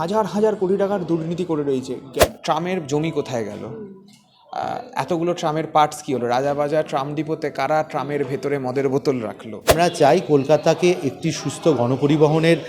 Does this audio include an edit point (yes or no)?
yes